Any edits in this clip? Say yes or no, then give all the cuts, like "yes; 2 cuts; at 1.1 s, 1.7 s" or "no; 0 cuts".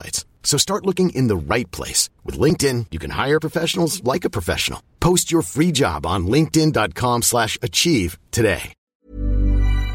yes; 1 cut; at 8.8 s